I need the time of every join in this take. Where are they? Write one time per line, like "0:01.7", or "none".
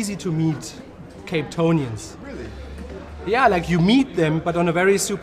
0:02.0